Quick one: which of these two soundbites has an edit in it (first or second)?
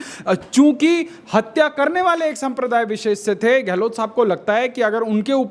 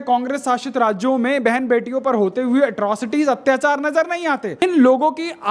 second